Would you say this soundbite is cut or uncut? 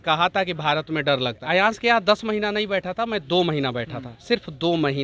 cut